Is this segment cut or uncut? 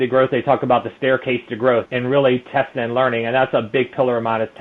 uncut